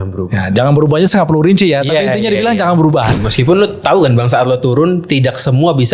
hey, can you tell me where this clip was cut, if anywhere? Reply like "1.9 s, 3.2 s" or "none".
3.2 s